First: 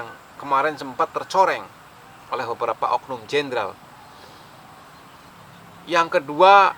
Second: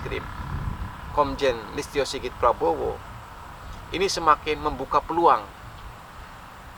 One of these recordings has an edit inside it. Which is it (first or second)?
first